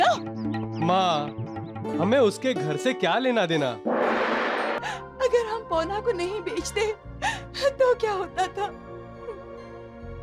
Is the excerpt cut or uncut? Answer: cut